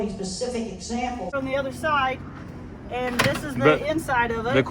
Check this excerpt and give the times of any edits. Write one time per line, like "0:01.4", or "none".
0:01.3

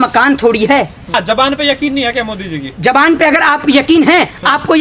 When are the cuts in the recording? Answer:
0:01.1

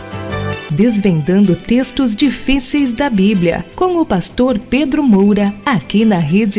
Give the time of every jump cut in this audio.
0:05.6

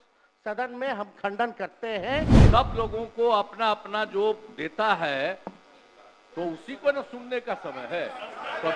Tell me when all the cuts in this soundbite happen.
0:02.4

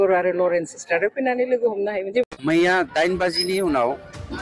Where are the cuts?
none

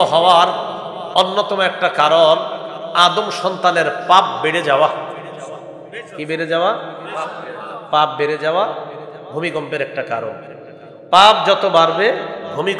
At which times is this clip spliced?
none

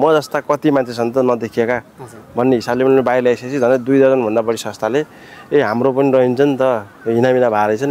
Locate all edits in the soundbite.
none

